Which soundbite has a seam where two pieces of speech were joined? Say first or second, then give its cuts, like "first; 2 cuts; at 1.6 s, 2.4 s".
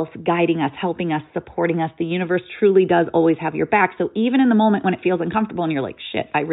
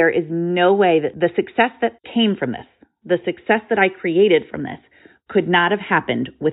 second; 2 cuts; at 1.1 s, 2.0 s